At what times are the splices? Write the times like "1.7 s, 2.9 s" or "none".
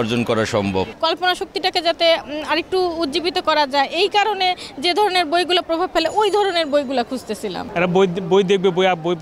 0.9 s, 7.6 s